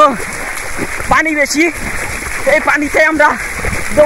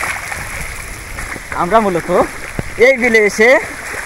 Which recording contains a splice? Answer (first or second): second